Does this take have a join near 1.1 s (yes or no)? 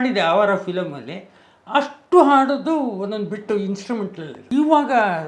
no